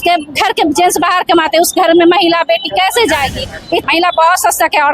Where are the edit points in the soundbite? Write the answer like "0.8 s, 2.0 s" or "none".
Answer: 3.8 s